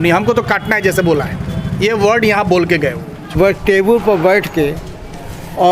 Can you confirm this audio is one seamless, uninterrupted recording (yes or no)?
no